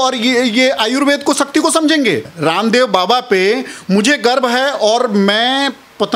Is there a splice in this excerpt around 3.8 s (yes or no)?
no